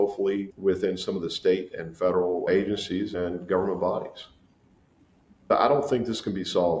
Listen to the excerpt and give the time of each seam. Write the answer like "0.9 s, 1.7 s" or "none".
5.5 s